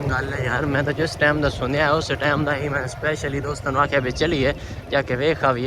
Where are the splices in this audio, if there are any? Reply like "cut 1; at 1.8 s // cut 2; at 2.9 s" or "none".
none